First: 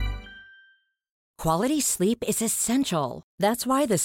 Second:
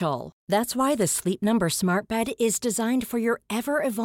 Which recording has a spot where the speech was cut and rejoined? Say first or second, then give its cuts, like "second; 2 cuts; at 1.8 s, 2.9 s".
first; 1 cut; at 1.3 s